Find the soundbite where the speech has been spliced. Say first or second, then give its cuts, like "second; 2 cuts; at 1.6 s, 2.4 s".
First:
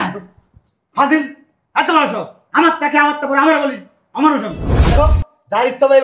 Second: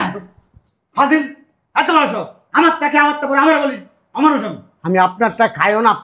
first; 1 cut; at 4.9 s